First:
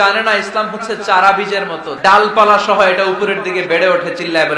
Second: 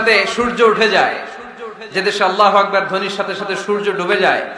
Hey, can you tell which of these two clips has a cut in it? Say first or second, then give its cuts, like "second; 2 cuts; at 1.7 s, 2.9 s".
first; 1 cut; at 1.9 s